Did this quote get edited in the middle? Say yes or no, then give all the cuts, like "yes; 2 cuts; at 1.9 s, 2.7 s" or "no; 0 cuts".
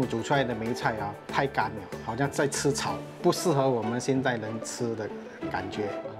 no; 0 cuts